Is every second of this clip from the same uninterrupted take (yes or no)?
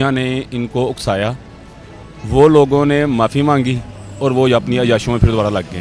yes